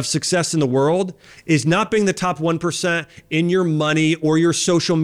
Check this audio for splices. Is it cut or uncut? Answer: uncut